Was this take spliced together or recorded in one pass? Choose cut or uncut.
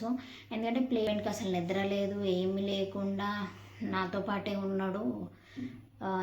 cut